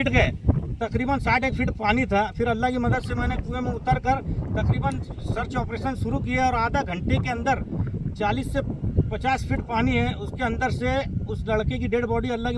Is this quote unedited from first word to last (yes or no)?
yes